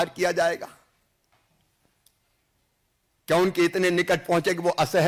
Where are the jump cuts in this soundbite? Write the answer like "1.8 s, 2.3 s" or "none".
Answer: none